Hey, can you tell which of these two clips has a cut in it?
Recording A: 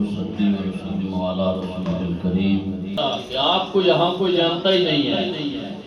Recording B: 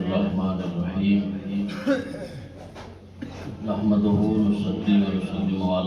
A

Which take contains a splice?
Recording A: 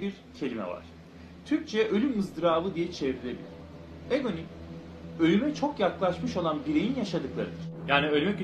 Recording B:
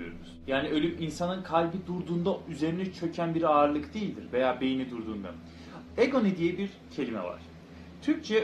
A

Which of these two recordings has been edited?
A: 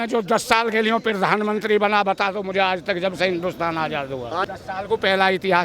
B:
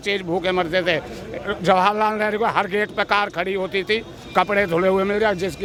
A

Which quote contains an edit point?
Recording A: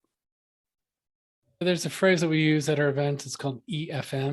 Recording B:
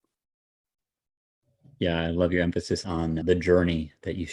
A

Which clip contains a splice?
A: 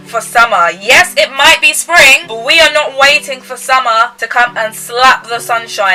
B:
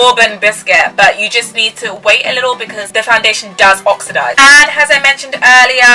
B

